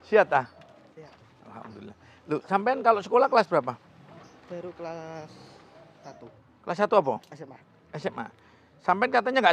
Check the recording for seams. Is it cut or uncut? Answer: uncut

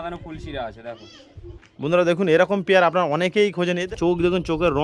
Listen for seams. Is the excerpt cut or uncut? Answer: cut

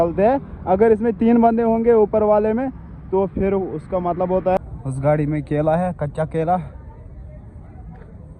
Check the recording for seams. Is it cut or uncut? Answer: cut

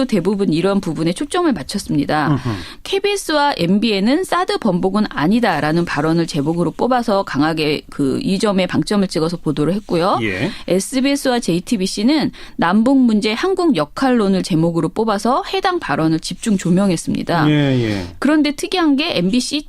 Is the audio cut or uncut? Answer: cut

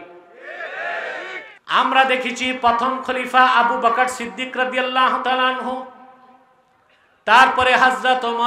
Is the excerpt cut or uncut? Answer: cut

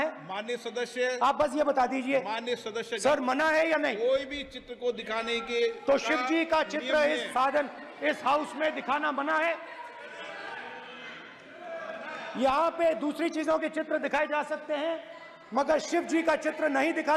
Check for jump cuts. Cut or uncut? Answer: uncut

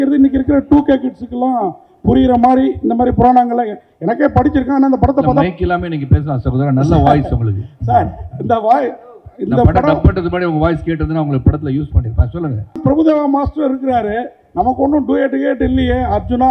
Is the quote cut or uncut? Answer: cut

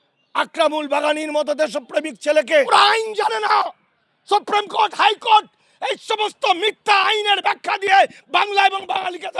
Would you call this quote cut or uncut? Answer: cut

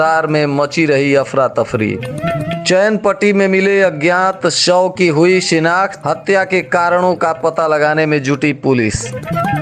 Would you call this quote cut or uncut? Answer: uncut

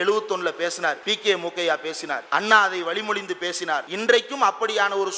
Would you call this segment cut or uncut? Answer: cut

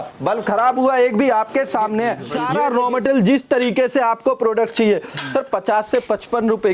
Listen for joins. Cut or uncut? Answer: cut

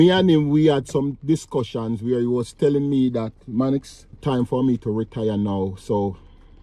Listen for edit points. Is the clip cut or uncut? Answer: cut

